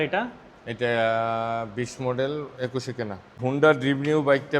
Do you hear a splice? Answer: yes; 1 cut; at 3.4 s

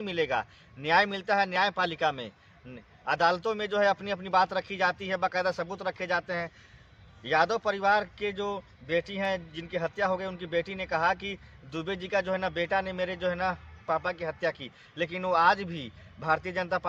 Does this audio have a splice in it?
no; 0 cuts

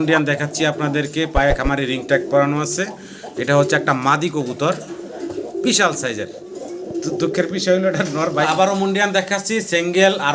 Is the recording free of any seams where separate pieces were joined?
no; 1 cut; at 8.5 s

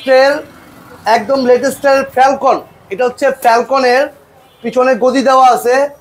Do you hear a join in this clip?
no; 0 cuts

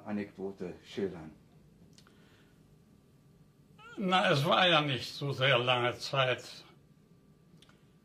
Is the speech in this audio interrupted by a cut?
no; 0 cuts

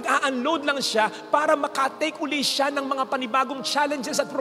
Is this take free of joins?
yes; 0 cuts

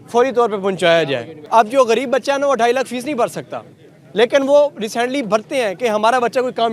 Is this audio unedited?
yes; 0 cuts

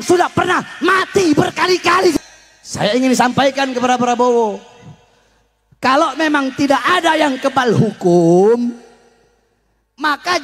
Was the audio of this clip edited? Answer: yes; 1 cut; at 2.1 s

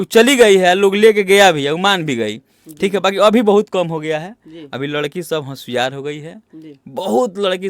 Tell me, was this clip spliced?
no; 0 cuts

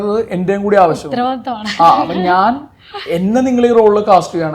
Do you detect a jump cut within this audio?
no; 0 cuts

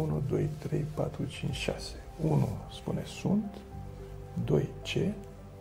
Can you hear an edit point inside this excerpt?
no; 0 cuts

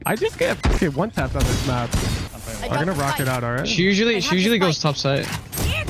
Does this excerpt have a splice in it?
yes; 1 cut; at 2.2 s

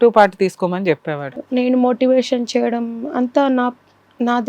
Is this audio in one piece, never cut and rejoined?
no; 1 cut; at 1.2 s

